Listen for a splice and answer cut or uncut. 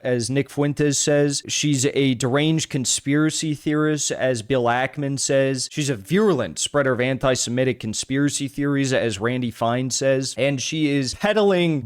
uncut